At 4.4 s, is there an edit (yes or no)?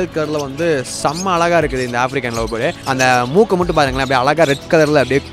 no